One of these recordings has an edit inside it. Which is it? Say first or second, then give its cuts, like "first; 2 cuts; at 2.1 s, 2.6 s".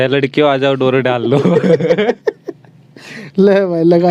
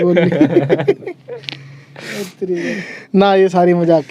second; 1 cut; at 2.6 s